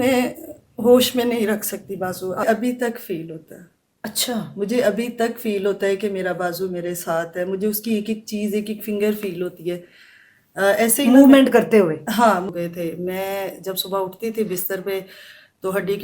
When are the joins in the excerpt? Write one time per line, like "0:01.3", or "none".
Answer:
0:02.4
0:12.5